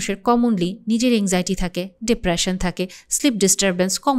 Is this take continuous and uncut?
yes; 0 cuts

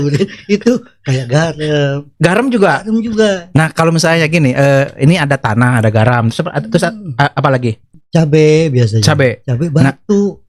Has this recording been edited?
yes; 1 cut; at 7.9 s

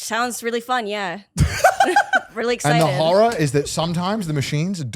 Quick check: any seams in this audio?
no; 0 cuts

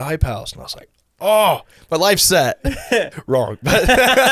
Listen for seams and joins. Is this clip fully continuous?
no; 1 cut; at 3.2 s

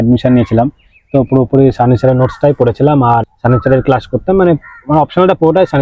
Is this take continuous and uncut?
yes; 0 cuts

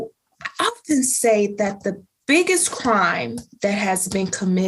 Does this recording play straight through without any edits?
yes; 0 cuts

